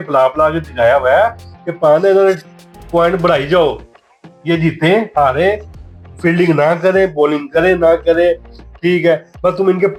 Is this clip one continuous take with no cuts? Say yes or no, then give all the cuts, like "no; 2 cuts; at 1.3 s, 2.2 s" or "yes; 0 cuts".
yes; 0 cuts